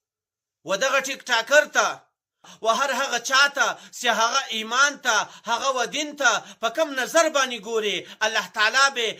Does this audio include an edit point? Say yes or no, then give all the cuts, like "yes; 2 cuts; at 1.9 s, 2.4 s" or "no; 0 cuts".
yes; 1 cut; at 2.5 s